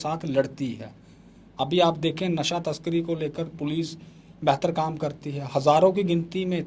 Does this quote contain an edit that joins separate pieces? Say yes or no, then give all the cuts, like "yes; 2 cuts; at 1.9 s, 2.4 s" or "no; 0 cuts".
no; 0 cuts